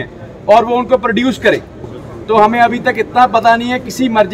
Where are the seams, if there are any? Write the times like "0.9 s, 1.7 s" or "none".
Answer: 1.9 s